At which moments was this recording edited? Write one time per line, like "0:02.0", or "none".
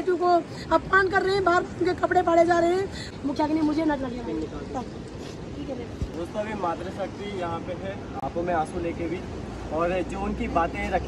0:03.1